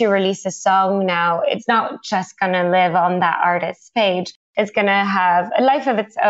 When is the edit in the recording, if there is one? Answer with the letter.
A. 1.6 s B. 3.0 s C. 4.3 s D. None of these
A